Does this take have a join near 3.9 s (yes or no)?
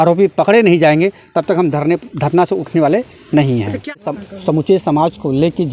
yes